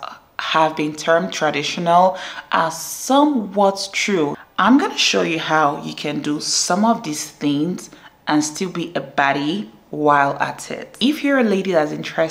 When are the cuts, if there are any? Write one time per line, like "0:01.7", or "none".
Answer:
0:04.4
0:10.9